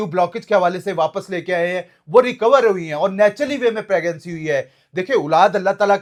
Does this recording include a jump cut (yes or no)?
no